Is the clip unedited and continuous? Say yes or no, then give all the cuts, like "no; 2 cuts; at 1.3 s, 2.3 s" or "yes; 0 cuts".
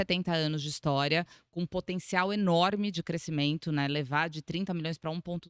yes; 0 cuts